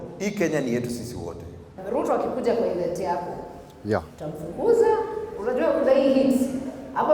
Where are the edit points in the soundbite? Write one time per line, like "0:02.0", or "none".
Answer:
0:01.7